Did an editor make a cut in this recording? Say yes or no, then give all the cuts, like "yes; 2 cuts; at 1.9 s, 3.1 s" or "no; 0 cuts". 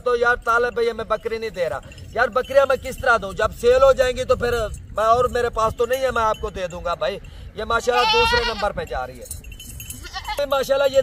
no; 0 cuts